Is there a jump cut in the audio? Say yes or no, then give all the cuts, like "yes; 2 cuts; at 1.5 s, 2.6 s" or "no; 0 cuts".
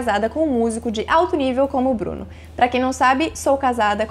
no; 0 cuts